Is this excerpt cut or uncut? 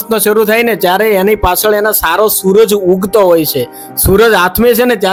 uncut